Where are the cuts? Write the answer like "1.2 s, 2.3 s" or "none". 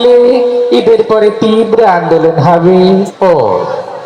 3.1 s